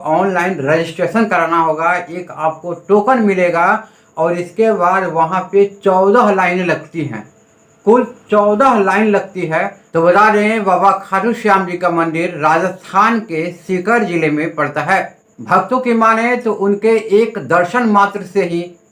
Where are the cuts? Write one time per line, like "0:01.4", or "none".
0:09.8
0:15.2